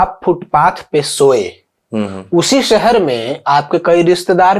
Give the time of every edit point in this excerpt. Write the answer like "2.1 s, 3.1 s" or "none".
none